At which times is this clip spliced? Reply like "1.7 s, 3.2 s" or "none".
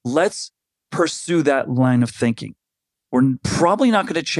2.9 s